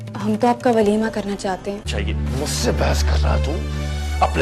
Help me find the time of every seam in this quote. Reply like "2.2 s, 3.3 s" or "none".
1.9 s